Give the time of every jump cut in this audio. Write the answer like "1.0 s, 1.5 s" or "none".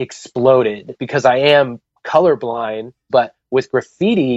0.9 s, 3.0 s